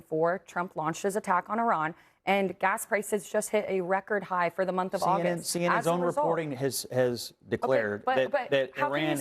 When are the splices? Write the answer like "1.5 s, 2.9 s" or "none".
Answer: none